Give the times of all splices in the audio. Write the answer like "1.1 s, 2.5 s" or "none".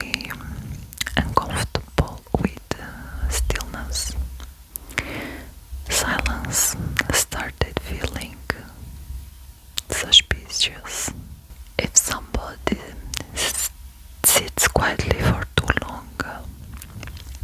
none